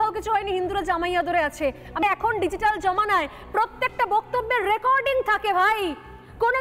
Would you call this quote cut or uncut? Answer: cut